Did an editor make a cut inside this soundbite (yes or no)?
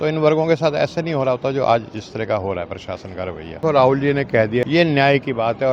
yes